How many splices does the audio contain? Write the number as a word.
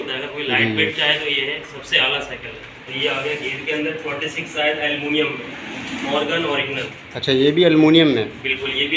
one